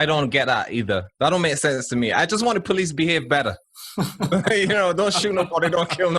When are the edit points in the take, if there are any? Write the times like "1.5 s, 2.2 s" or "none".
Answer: 1.1 s